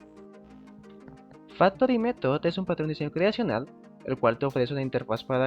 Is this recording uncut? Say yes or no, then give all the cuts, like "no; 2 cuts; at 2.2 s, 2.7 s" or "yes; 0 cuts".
no; 1 cut; at 1.0 s